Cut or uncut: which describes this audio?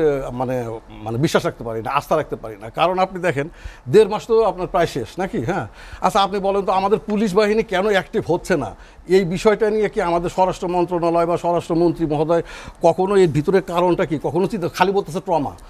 uncut